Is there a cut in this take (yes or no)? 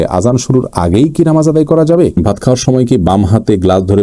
yes